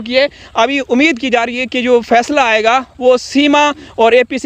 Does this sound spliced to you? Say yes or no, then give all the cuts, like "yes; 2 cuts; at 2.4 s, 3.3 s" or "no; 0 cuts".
no; 0 cuts